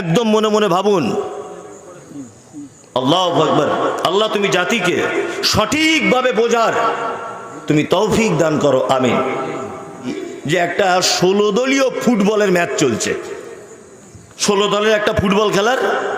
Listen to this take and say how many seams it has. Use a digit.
1